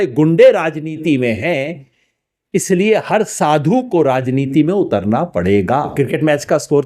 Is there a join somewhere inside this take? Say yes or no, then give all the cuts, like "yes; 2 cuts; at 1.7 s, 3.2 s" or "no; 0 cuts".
yes; 1 cut; at 5.9 s